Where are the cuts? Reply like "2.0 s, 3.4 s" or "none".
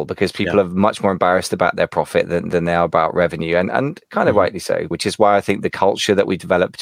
4.9 s